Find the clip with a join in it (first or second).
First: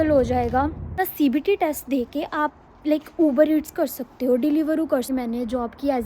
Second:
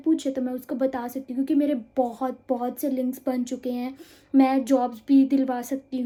first